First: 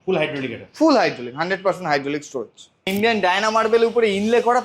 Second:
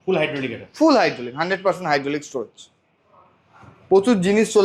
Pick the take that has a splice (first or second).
first